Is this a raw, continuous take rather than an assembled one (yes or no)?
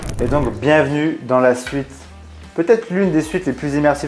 yes